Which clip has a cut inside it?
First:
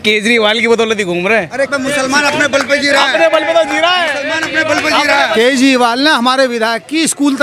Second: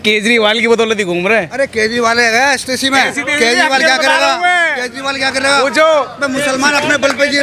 first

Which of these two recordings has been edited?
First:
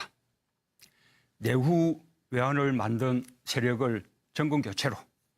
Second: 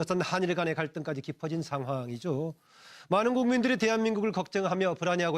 first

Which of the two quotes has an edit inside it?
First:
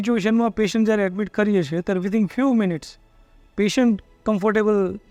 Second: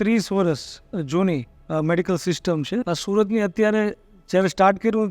second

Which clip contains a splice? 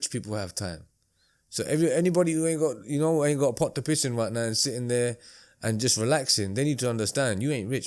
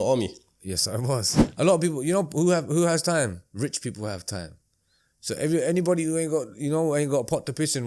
second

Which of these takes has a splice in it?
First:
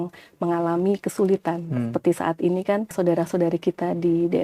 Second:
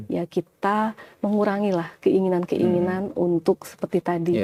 first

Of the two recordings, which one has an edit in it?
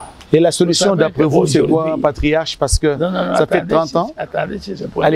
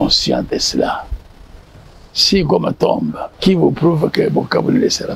second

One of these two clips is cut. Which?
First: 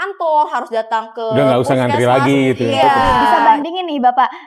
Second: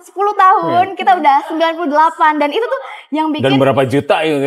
first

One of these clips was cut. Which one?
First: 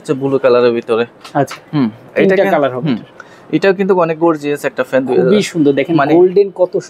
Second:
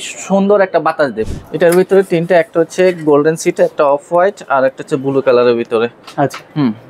second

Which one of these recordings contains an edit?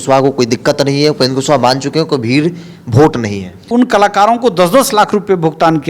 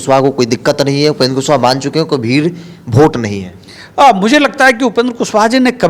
first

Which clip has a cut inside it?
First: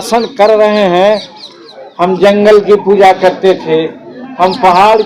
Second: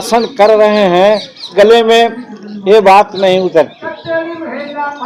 first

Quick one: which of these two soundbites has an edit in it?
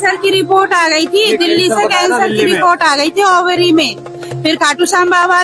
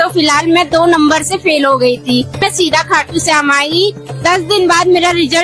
second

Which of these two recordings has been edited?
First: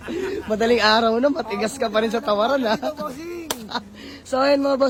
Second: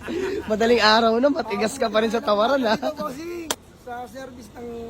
second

